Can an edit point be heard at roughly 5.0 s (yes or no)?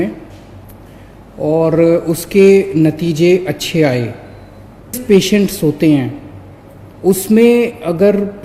yes